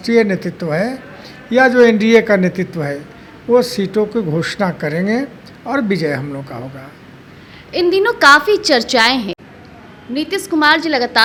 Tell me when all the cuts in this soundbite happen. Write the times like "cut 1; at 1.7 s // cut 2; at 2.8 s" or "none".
none